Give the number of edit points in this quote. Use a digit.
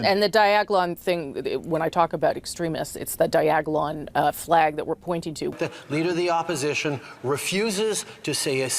1